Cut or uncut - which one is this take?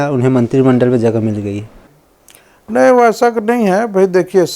cut